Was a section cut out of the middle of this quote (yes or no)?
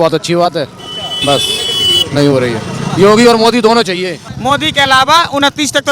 yes